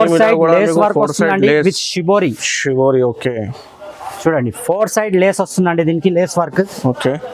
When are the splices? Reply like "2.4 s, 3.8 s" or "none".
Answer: none